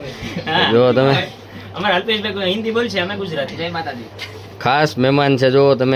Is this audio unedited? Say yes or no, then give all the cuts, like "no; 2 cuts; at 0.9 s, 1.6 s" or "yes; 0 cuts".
yes; 0 cuts